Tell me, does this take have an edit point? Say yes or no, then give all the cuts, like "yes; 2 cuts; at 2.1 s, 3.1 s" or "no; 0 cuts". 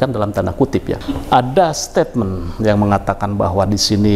yes; 1 cut; at 1.0 s